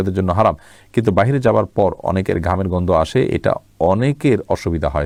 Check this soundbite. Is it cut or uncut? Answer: uncut